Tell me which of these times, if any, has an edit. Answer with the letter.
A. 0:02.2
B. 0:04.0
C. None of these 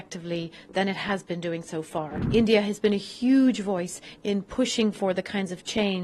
A